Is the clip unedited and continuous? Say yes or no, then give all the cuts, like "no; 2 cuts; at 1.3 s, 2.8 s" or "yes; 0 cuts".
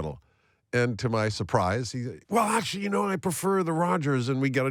yes; 0 cuts